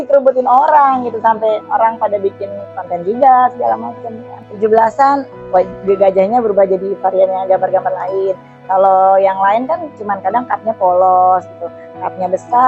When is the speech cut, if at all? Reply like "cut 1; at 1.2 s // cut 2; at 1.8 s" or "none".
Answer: cut 1; at 4.4 s